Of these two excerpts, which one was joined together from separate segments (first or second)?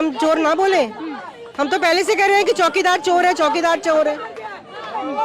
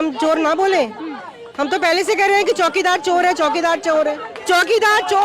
second